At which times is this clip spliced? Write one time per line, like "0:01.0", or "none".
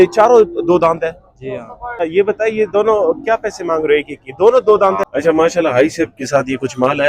0:02.0
0:05.0